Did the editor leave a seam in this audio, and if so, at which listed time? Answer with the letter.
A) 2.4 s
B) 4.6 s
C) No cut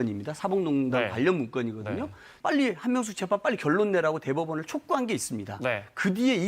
A